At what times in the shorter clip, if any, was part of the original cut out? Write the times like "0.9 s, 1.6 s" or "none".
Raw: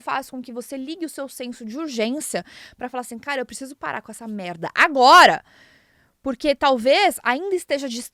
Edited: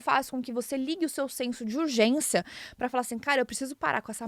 none